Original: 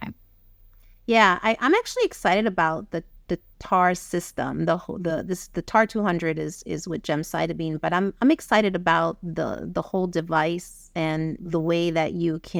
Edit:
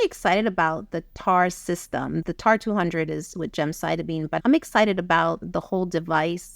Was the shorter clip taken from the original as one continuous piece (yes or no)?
no